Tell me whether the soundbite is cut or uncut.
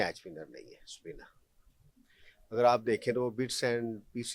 uncut